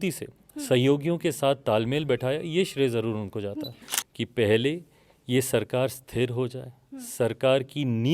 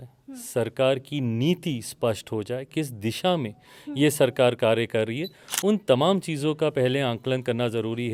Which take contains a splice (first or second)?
first